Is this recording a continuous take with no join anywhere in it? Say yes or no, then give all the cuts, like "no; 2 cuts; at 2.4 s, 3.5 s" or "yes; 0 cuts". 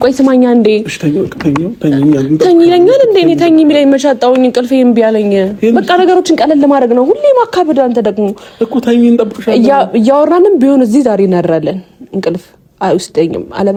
yes; 0 cuts